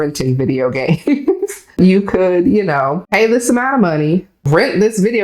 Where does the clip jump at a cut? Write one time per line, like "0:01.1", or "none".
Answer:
0:01.8
0:03.0
0:04.3